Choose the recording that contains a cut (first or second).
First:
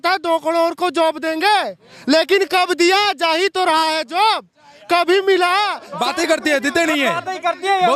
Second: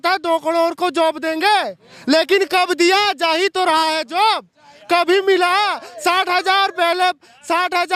first